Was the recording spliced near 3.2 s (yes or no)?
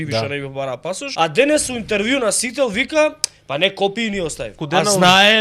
no